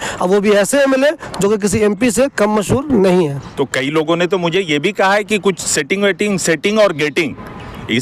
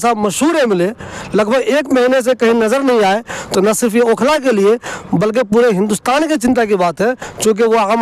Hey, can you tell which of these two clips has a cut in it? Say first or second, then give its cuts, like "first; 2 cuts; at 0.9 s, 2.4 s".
first; 1 cut; at 3.4 s